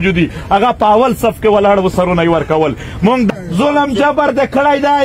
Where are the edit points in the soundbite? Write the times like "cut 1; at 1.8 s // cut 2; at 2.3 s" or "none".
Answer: cut 1; at 3.3 s